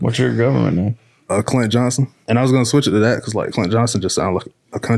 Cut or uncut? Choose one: cut